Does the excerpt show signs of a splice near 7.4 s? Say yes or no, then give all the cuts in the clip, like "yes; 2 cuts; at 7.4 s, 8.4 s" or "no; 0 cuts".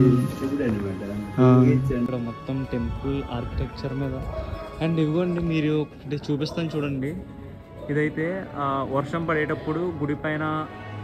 no; 1 cut; at 2.1 s